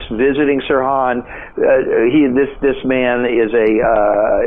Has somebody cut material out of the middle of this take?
no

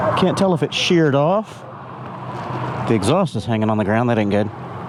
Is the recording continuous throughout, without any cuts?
yes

